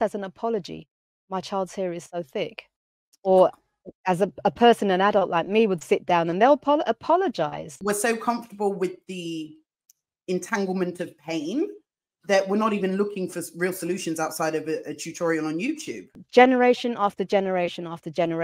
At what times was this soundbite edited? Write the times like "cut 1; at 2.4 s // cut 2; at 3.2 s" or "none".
cut 1; at 7.8 s // cut 2; at 16.2 s